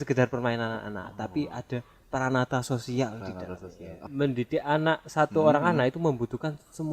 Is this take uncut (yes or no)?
no